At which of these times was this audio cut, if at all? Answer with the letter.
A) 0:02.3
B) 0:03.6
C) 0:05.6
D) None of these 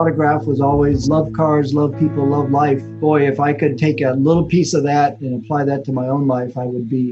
D